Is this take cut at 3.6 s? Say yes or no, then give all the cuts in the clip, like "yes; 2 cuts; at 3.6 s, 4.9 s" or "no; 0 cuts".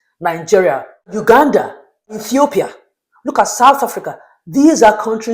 no; 2 cuts; at 1.2 s, 2.2 s